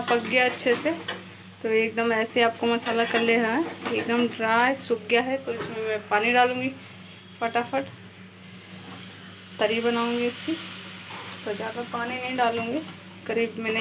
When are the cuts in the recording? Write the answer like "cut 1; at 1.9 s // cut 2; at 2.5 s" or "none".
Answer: none